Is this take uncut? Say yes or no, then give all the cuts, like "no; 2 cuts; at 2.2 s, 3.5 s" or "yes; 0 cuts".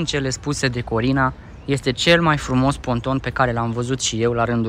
yes; 0 cuts